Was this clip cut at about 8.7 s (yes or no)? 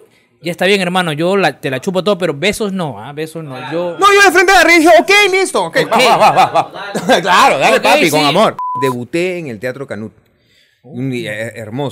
yes